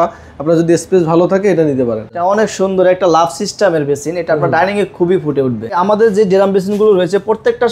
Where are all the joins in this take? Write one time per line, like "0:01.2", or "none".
0:02.1
0:05.7

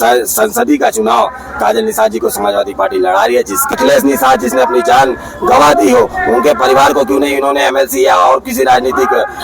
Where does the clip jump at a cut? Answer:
0:03.7

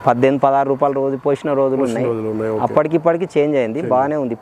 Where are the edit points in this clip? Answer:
none

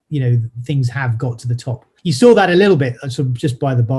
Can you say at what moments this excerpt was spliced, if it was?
none

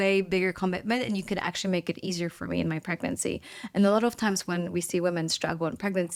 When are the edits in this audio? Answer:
none

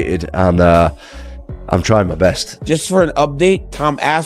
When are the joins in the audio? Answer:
0:02.3

